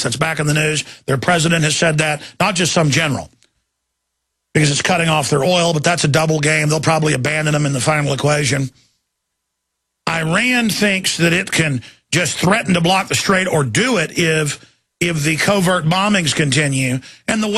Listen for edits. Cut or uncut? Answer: uncut